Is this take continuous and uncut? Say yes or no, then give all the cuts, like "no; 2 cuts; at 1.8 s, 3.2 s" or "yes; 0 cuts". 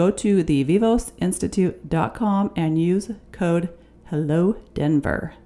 yes; 0 cuts